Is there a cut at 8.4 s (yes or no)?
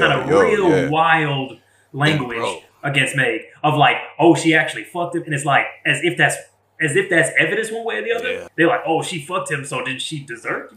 yes